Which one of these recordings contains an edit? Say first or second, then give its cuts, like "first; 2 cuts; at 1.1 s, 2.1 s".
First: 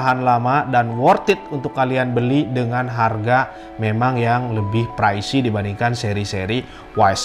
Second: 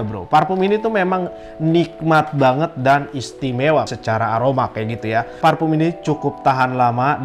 second; 2 cuts; at 3.9 s, 5.3 s